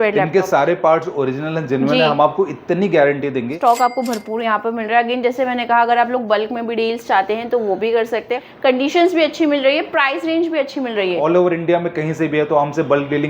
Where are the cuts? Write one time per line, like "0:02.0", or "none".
0:03.6
0:08.4
0:11.2